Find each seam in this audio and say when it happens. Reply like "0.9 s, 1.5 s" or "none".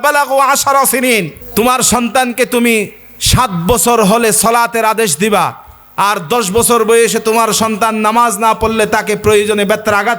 1.4 s